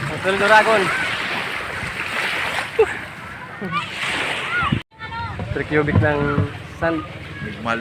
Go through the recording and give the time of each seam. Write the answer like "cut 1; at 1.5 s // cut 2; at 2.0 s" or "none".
cut 1; at 5.0 s